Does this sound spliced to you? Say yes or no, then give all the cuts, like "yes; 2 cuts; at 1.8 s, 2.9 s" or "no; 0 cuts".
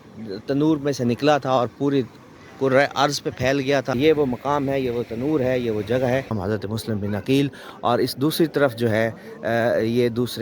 yes; 2 cuts; at 3.9 s, 6.4 s